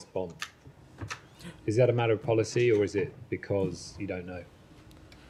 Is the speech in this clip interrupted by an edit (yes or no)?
no